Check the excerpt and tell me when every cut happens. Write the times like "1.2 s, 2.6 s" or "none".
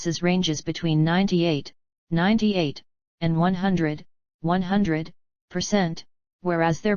none